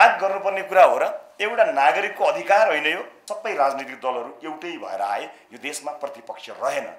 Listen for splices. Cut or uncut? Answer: cut